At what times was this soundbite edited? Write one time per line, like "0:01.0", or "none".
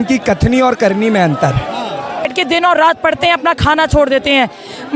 0:02.3